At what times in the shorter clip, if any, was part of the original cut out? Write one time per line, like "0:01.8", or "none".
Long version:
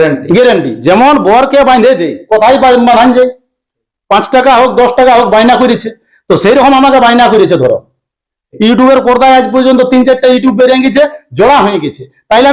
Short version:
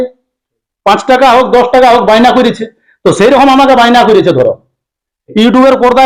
none